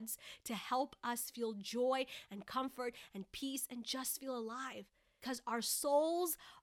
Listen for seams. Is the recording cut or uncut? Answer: cut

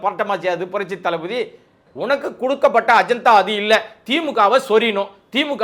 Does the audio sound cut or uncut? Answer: cut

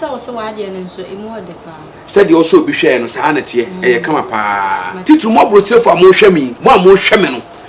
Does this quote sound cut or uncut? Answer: cut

